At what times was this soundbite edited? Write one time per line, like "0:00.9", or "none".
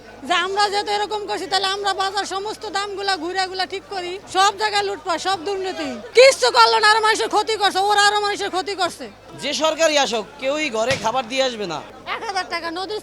0:04.2
0:09.3
0:11.9